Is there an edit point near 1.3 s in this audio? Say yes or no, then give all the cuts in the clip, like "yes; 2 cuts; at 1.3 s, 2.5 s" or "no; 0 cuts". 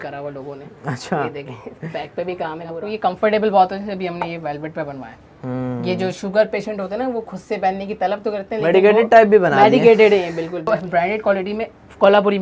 no; 2 cuts; at 2.9 s, 10.7 s